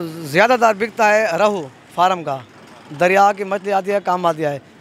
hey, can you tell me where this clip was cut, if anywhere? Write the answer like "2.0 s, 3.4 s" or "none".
none